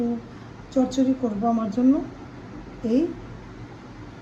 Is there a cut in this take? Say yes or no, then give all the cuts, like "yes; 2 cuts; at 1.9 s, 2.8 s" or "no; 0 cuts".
no; 0 cuts